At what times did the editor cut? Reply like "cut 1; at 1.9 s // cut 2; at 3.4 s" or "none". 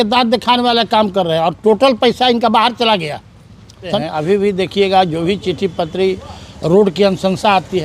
cut 1; at 4.0 s